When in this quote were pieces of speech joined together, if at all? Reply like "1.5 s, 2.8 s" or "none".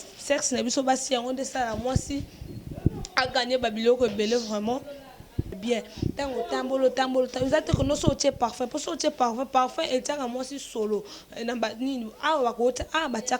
5.5 s